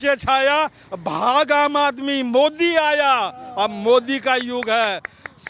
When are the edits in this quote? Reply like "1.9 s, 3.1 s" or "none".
none

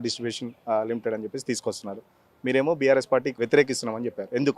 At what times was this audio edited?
none

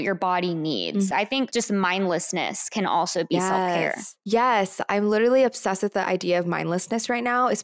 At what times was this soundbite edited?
1.1 s

